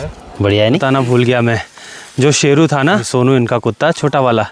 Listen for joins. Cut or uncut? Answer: cut